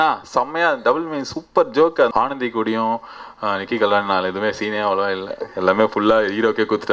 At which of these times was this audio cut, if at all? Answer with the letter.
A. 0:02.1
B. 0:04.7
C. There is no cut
A